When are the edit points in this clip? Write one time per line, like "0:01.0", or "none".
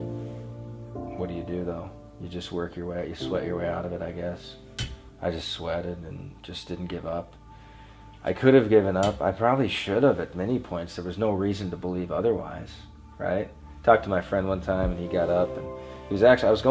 0:01.2